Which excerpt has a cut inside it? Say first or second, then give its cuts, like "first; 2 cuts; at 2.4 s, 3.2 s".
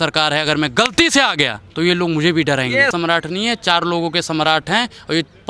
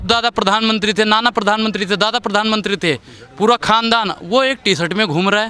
first; 2 cuts; at 1.6 s, 2.9 s